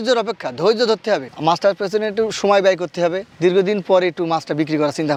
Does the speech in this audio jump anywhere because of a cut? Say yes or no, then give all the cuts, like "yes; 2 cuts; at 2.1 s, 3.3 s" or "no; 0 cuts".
no; 0 cuts